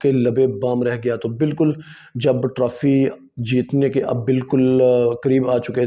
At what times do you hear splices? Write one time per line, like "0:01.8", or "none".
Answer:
none